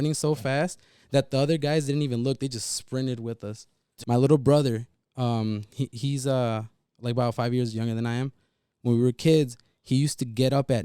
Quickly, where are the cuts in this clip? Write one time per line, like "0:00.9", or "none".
0:03.9